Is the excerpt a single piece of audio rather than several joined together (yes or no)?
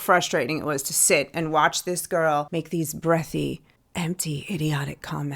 no